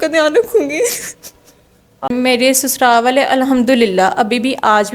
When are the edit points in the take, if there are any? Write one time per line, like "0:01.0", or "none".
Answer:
0:02.1